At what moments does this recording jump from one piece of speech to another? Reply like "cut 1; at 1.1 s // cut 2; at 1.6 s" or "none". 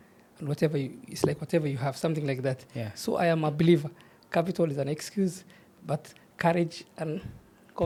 none